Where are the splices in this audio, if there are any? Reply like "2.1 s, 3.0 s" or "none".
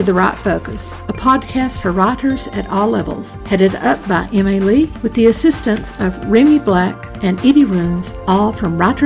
5.6 s